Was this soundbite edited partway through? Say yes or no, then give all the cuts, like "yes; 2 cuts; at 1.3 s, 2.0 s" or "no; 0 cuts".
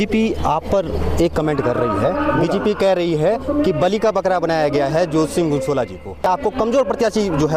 no; 0 cuts